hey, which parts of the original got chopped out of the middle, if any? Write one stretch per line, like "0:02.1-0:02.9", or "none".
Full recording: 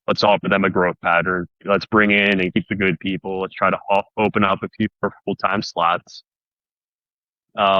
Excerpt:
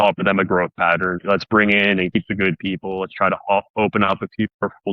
0:01.4-0:01.6